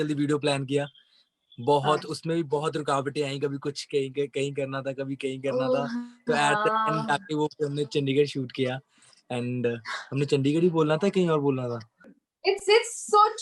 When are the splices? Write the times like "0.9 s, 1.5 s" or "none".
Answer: 12.0 s